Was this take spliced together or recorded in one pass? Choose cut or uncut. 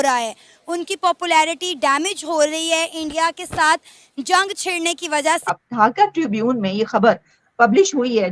cut